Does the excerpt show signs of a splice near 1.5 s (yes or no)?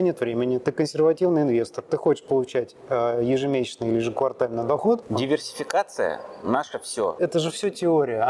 no